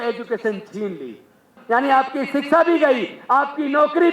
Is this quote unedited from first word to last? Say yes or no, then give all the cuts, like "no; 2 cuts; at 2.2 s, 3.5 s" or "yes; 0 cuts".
no; 1 cut; at 1.5 s